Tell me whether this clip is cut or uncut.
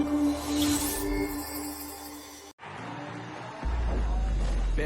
cut